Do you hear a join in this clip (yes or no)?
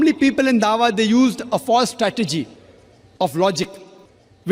no